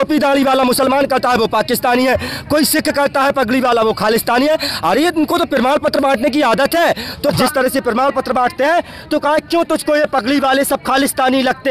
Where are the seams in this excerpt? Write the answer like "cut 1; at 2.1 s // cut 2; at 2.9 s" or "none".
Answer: cut 1; at 7.4 s